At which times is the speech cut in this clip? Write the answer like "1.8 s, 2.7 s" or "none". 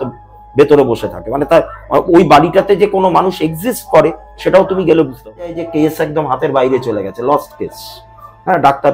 5.6 s